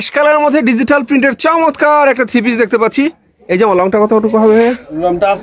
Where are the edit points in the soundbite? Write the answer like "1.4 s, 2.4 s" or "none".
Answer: none